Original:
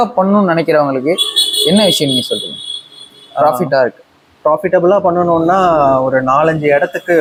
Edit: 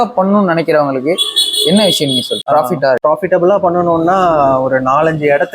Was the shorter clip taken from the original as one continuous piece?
no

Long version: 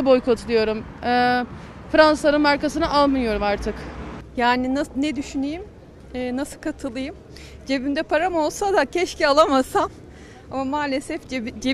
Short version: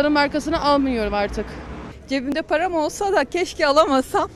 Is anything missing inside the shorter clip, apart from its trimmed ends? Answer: yes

